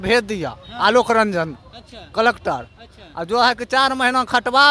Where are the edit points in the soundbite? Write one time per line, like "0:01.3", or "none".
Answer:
none

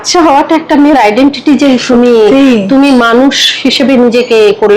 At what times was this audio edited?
none

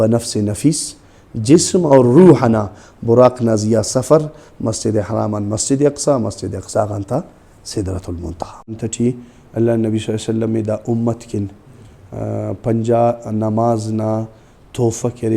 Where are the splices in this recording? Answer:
0:08.8

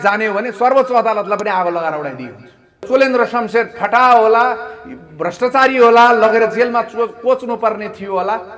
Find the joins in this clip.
0:02.8

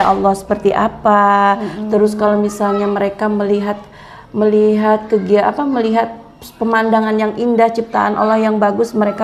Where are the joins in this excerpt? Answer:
none

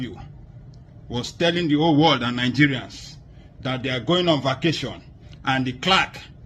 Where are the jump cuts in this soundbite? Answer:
none

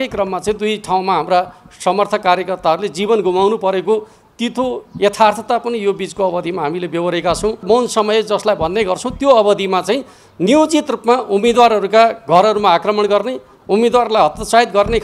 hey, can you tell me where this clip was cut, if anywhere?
0:07.6

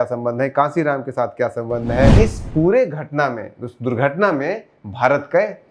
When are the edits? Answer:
0:02.1

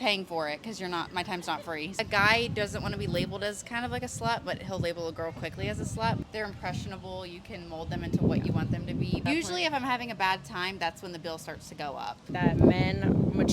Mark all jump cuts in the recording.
0:01.9
0:06.2
0:09.2
0:12.3

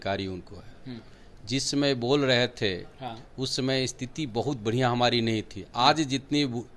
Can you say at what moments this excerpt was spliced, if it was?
none

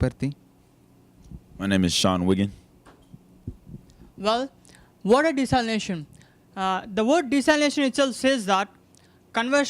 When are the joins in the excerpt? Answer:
0:03.5

